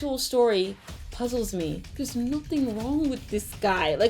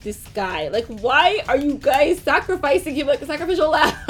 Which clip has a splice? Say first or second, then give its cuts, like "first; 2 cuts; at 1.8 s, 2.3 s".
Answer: first; 1 cut; at 1.9 s